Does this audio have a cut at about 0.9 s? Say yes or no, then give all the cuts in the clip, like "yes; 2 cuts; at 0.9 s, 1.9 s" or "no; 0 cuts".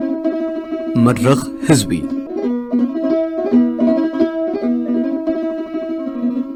no; 0 cuts